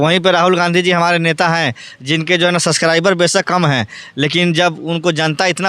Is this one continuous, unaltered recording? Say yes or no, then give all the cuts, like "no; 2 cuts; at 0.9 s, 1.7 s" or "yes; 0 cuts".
yes; 0 cuts